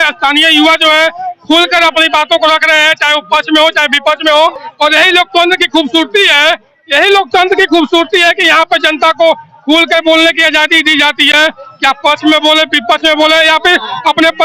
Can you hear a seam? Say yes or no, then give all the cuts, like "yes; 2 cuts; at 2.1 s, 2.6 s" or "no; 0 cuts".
no; 0 cuts